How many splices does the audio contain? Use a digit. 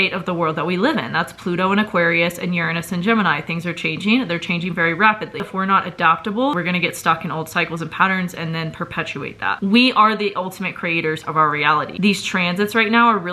3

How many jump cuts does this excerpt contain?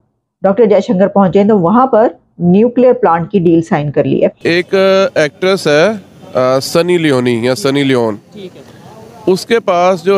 1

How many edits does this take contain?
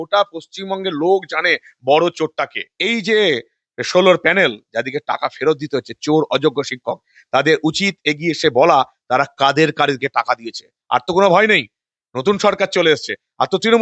1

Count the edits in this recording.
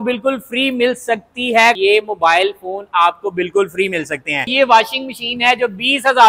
2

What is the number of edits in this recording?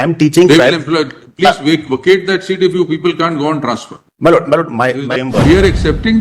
1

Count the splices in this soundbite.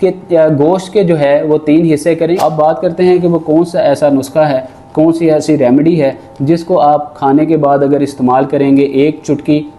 1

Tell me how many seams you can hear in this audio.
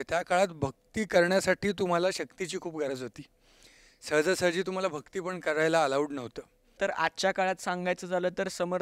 1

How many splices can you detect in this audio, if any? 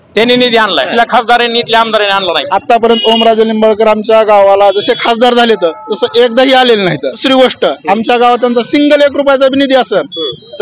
3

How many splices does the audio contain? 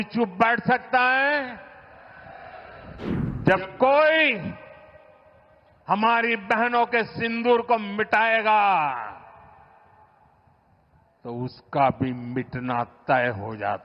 1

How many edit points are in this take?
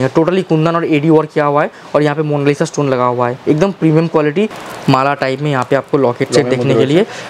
1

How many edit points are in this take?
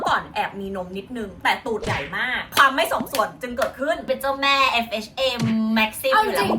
2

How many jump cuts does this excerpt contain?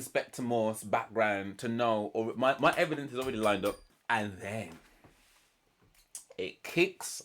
1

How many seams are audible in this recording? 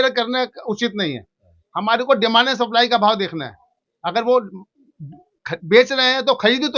0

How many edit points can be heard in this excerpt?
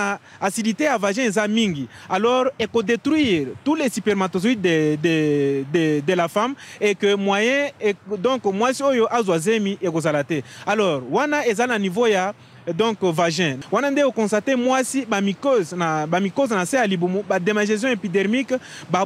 0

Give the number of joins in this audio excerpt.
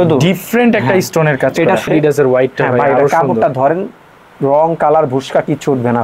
1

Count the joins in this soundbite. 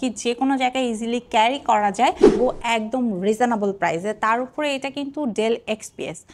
1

